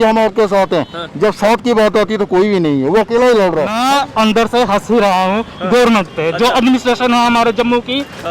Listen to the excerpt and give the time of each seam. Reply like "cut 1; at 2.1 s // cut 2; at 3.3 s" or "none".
cut 1; at 3.7 s